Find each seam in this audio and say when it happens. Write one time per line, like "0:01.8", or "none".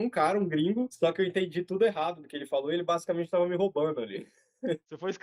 0:00.9